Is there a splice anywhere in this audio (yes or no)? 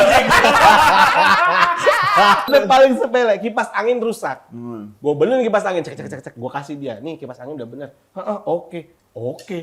yes